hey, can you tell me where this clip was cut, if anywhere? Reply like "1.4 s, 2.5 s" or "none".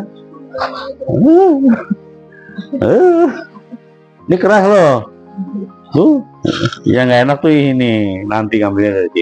none